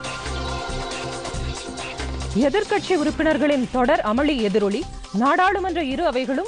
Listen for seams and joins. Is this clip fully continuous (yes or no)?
no